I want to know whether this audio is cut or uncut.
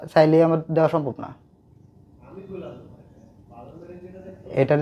uncut